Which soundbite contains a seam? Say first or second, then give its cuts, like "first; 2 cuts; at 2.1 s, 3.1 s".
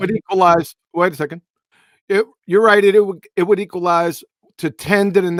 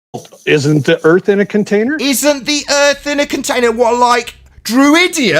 second; 1 cut; at 1.9 s